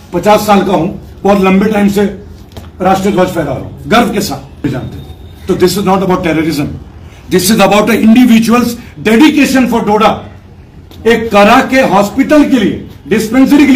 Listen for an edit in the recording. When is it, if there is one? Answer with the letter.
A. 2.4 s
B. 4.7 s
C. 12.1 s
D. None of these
B